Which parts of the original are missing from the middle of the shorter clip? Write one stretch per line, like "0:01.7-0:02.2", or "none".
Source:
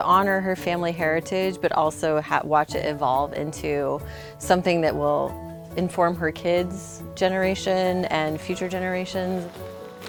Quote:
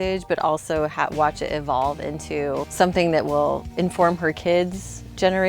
0:04.0-0:04.4
0:05.4-0:05.6